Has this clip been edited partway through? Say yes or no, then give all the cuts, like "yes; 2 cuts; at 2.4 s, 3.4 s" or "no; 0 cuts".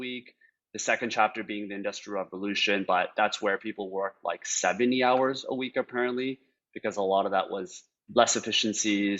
yes; 1 cut; at 8.0 s